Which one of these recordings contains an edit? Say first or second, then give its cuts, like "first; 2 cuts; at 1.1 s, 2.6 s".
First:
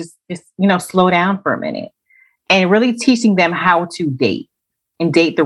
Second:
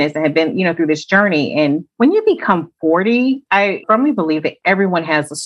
second; 2 cuts; at 1.9 s, 3.8 s